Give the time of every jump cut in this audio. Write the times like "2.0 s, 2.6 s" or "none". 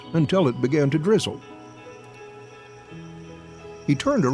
1.4 s, 3.4 s